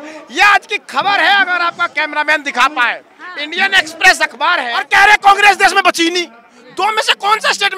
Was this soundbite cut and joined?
yes; 1 cut; at 4.8 s

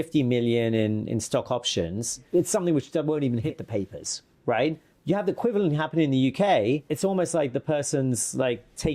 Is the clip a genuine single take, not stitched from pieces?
no; 2 cuts; at 4.9 s, 6.9 s

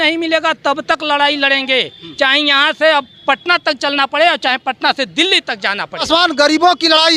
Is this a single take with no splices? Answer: no; 1 cut; at 6.0 s

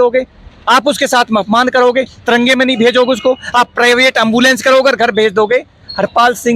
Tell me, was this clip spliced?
no; 0 cuts

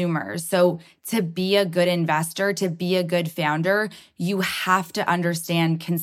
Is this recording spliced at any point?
no; 0 cuts

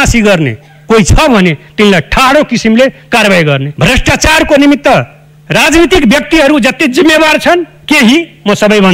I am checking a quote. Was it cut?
yes; 1 cut; at 3.7 s

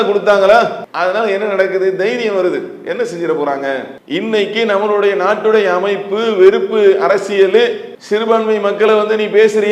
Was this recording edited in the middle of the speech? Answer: no; 0 cuts

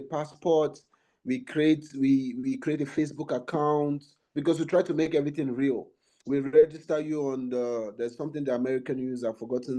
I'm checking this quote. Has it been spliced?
no; 0 cuts

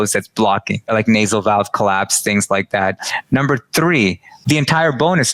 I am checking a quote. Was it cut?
yes; 2 cuts; at 0.9 s, 4.4 s

